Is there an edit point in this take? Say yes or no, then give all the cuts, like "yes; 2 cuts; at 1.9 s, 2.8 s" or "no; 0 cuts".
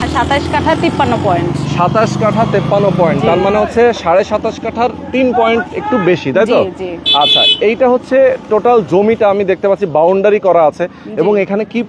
no; 0 cuts